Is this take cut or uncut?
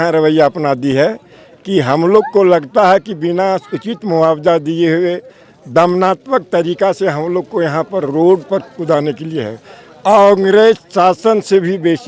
uncut